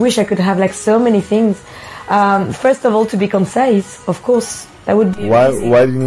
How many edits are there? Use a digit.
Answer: 1